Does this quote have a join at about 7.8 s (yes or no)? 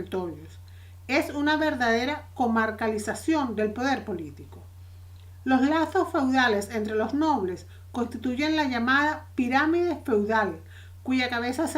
yes